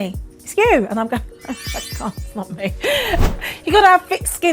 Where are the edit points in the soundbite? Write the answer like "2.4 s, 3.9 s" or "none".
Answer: 3.2 s